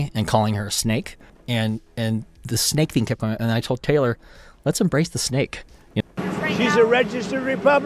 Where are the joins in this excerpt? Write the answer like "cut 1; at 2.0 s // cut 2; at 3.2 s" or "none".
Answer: cut 1; at 5.9 s